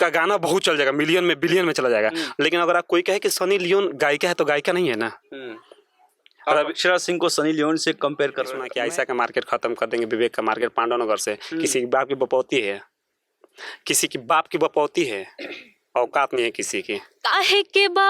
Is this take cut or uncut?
cut